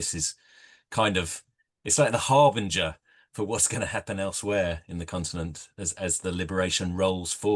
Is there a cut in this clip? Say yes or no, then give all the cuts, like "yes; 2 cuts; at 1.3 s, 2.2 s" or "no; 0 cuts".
no; 0 cuts